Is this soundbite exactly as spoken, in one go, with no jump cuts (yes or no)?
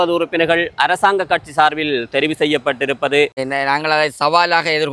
no